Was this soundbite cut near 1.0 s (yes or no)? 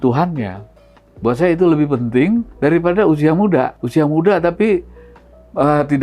no